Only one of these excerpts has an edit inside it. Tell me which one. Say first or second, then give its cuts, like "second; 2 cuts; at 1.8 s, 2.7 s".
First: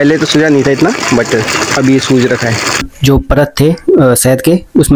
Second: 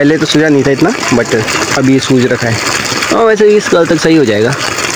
first; 1 cut; at 2.9 s